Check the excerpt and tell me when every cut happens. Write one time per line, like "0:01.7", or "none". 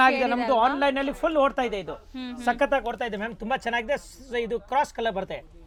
none